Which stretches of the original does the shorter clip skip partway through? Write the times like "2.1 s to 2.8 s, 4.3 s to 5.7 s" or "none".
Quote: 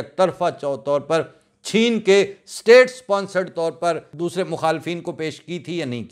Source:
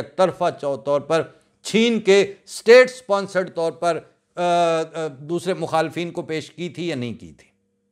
4.1 s to 5.2 s

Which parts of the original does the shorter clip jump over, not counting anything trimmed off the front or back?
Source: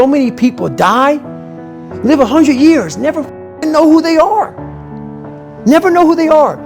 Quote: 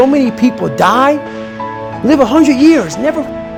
none

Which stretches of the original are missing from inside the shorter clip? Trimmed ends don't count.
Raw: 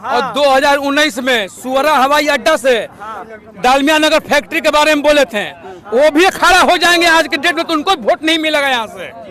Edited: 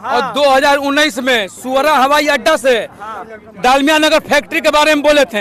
none

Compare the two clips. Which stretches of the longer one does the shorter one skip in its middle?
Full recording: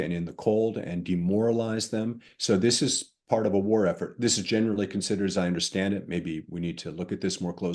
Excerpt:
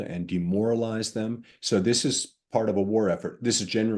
none

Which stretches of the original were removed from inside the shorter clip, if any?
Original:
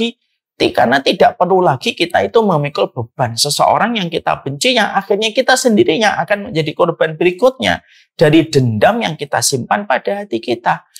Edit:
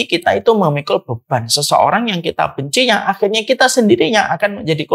none

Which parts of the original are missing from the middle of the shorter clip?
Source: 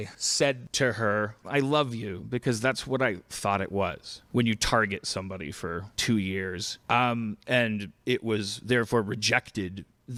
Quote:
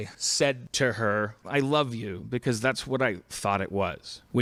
none

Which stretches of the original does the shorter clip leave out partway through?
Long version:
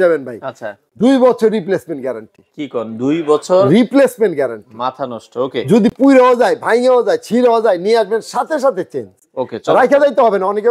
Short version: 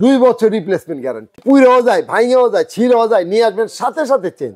2.4 s to 5.9 s

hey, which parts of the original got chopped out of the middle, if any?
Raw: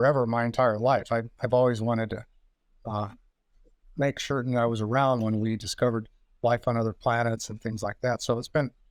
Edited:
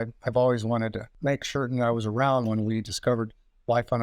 2.2 s to 3.8 s

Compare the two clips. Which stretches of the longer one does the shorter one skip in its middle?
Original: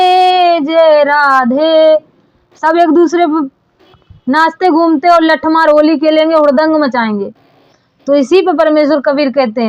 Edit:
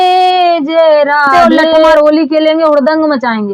2.0 s to 5.7 s

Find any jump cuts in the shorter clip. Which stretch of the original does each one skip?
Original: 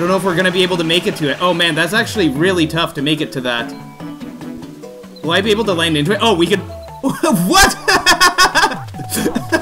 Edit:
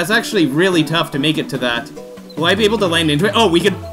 3.7 s to 4.7 s

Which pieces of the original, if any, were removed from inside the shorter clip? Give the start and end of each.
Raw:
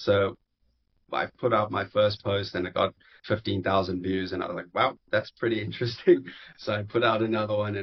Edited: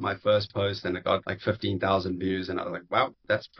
3.0 s to 3.1 s

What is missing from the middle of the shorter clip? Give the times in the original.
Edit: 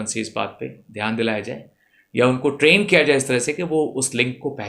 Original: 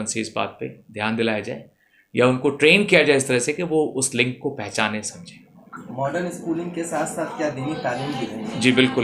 none

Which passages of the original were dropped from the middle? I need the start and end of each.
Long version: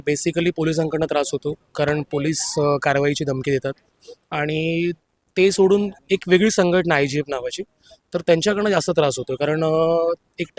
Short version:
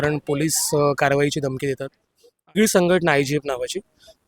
4.4 s to 6.4 s

